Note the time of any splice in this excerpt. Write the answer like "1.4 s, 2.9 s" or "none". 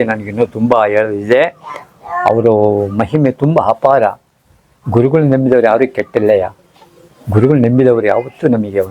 none